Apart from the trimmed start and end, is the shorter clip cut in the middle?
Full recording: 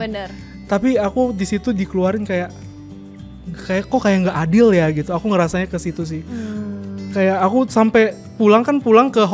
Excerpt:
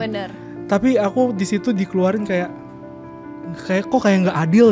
no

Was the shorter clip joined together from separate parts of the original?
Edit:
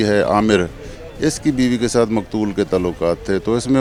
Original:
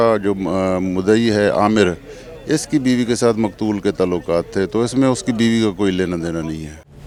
no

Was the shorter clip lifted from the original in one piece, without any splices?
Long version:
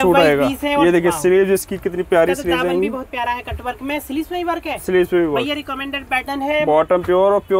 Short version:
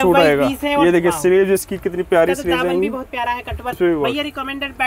no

